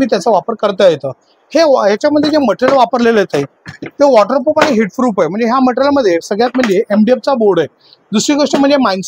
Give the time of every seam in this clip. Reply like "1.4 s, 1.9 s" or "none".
none

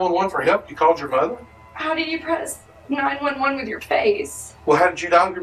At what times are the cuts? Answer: none

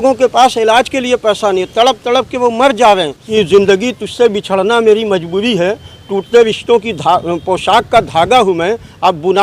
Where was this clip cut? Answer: 3.2 s

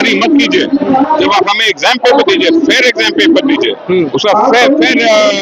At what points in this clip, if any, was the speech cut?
none

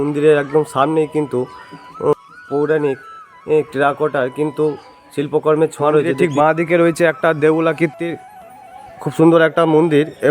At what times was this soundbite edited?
2.1 s, 6.1 s

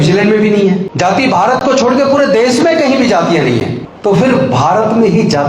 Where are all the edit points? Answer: 0.9 s, 3.8 s

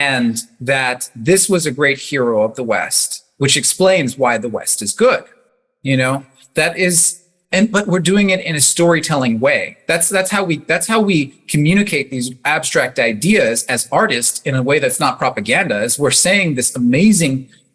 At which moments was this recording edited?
none

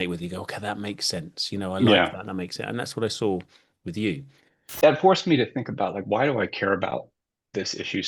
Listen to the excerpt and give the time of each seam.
4.7 s

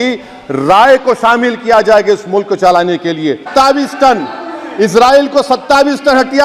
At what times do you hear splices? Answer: 3.5 s

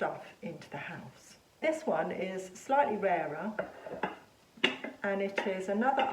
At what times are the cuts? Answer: 1.6 s

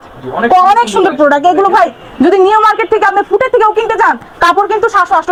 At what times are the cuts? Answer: none

